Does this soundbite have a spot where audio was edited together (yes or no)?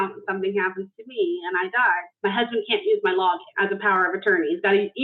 yes